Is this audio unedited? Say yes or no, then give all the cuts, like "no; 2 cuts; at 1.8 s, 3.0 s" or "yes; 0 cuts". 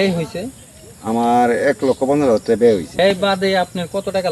no; 1 cut; at 3.0 s